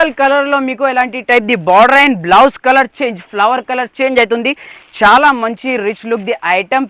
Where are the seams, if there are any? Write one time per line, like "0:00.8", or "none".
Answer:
none